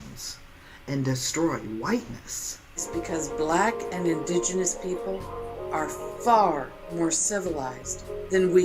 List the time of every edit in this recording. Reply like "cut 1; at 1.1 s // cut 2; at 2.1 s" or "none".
cut 1; at 2.9 s